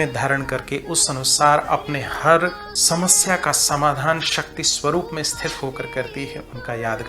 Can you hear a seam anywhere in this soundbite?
yes; 1 cut; at 2.7 s

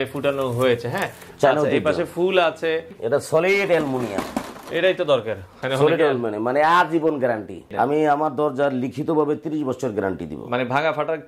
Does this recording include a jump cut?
yes; 2 cuts; at 2.9 s, 7.7 s

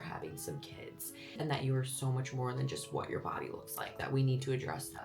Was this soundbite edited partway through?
yes; 2 cuts; at 1.3 s, 4.0 s

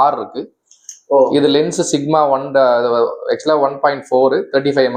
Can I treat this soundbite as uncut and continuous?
yes; 0 cuts

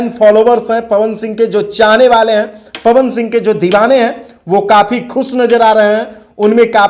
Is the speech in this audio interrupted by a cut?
no; 0 cuts

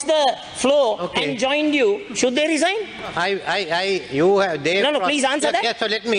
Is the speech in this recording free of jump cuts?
yes; 0 cuts

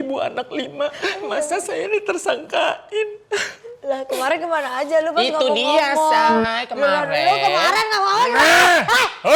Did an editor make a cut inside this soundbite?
no; 0 cuts

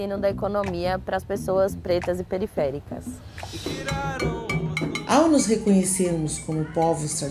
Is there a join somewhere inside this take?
yes; 2 cuts; at 3.7 s, 5.0 s

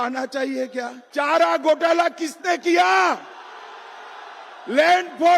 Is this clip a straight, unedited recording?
no; 1 cut; at 1.0 s

